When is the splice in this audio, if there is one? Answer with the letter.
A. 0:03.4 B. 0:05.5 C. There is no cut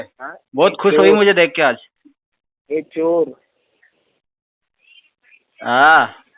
C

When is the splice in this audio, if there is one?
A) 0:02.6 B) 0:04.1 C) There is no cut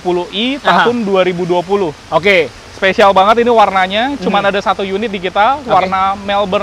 C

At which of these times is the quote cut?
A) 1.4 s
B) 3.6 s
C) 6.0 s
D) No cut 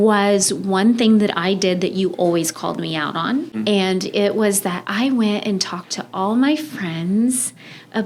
B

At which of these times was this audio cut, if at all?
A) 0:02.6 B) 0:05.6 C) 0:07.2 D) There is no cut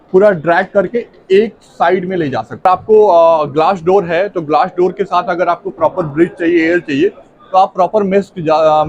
A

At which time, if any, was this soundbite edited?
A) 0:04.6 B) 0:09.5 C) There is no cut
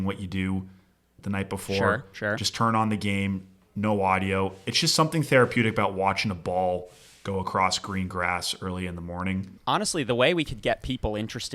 B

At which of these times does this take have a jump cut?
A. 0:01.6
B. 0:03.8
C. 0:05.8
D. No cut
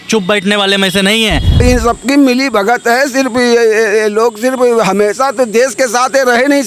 A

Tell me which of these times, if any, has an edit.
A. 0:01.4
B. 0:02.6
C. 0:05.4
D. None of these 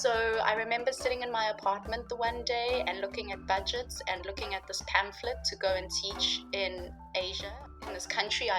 D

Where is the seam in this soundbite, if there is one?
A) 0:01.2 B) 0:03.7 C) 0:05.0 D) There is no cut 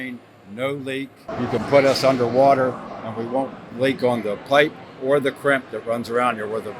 A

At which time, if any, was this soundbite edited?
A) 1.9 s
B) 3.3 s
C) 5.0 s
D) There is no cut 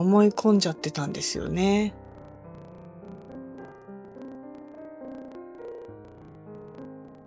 D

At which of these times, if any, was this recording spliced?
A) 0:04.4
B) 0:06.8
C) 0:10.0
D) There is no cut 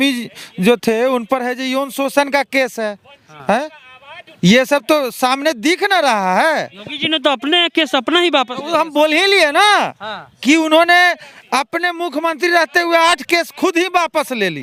D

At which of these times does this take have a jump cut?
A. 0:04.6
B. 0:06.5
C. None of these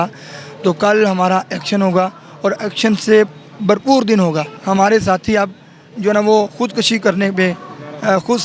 A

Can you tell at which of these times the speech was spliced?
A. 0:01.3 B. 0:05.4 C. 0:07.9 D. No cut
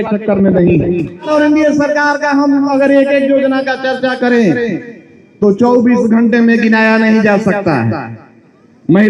A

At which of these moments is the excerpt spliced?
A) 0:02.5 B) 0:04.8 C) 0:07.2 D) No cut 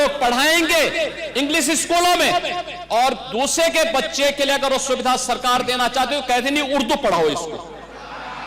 D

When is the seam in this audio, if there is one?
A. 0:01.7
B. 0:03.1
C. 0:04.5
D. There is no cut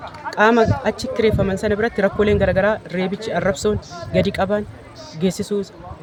D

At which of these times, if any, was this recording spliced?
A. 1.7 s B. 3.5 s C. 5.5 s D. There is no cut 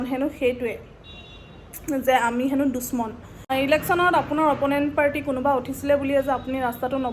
B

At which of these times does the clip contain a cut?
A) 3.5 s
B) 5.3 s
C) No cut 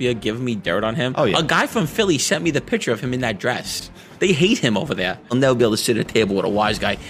B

